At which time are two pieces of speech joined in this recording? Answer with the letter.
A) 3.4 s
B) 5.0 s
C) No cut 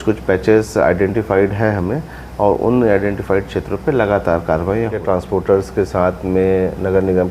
B